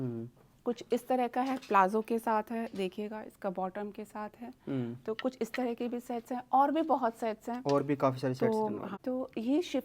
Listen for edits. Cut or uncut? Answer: cut